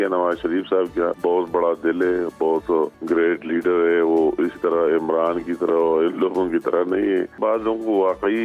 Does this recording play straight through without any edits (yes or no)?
no